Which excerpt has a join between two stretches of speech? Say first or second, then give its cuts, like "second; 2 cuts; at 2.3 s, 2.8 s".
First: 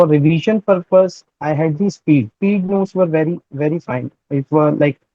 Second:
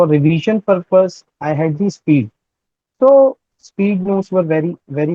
first; 1 cut; at 2.3 s